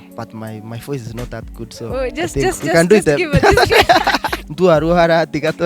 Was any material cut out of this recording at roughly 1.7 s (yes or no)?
no